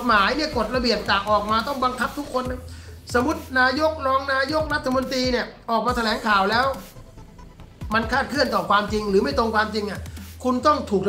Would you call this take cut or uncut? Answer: uncut